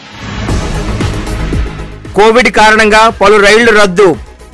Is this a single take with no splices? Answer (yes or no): yes